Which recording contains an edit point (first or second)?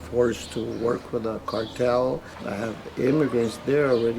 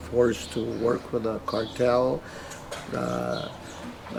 first